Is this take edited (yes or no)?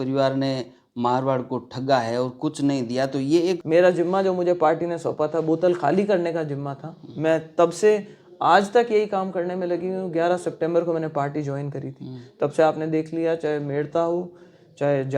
yes